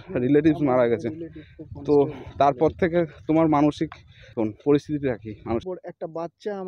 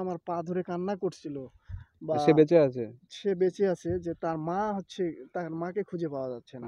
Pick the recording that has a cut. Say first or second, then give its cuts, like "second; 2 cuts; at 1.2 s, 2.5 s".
first; 2 cuts; at 4.4 s, 5.6 s